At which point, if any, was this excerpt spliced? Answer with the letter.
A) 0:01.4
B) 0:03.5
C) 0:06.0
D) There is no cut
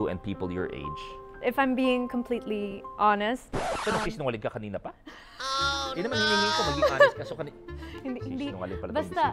A